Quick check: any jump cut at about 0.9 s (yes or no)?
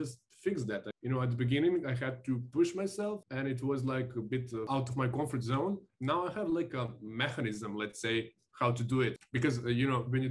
yes